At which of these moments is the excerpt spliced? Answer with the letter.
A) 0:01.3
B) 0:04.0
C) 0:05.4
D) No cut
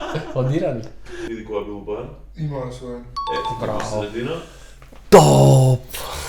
A